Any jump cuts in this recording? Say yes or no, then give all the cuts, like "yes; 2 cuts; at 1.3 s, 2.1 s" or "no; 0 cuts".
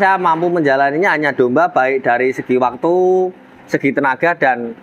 no; 0 cuts